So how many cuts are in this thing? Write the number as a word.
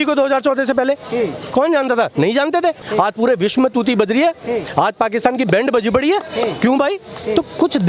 one